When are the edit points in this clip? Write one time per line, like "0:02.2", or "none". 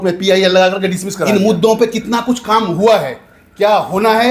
0:01.3